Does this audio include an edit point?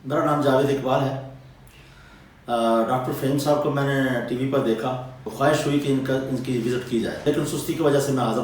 yes; 2 cuts; at 5.3 s, 7.2 s

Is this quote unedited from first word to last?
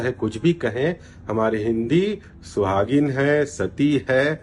yes; 0 cuts

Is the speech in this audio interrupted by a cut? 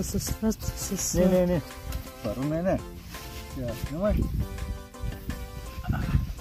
no; 0 cuts

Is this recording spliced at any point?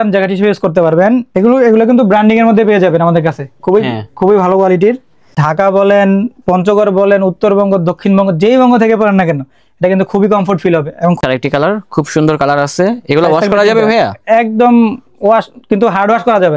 yes; 3 cuts; at 1.3 s, 5.4 s, 11.2 s

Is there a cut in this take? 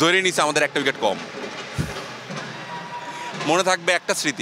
yes; 1 cut; at 3.2 s

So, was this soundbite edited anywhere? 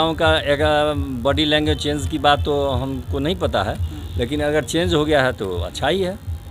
no; 0 cuts

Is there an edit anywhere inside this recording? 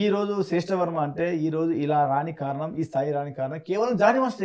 no; 0 cuts

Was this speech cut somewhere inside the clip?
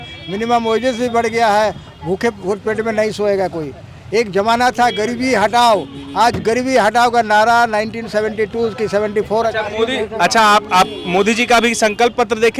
no; 0 cuts

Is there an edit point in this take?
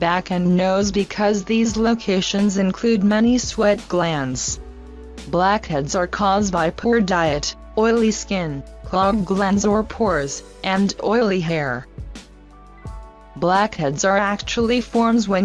yes; 1 cut; at 5.1 s

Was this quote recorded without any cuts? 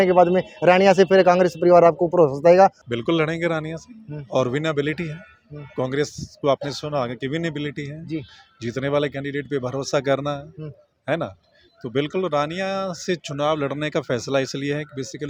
yes; 0 cuts

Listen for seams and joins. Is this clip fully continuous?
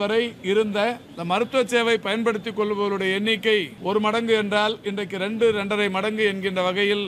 no; 2 cuts; at 1.1 s, 3.7 s

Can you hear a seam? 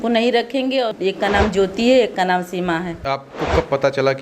yes; 2 cuts; at 0.9 s, 3.1 s

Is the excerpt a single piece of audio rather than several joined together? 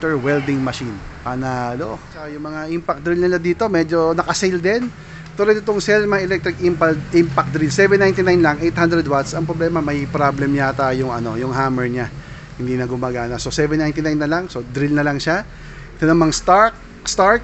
yes; 0 cuts

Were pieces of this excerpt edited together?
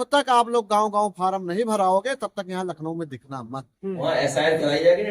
yes; 1 cut; at 4.0 s

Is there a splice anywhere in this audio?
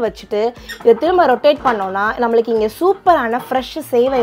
no; 0 cuts

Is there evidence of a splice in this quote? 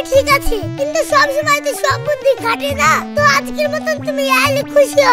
no; 0 cuts

